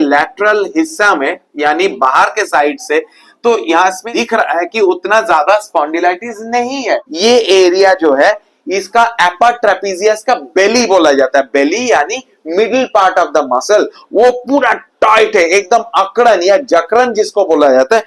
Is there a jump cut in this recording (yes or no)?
yes